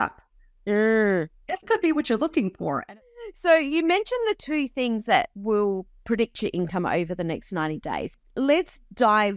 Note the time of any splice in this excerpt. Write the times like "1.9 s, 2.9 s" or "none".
2.8 s, 8.1 s